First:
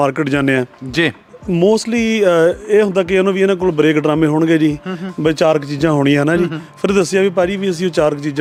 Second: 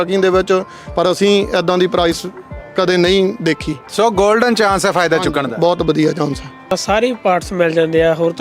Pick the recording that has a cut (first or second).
second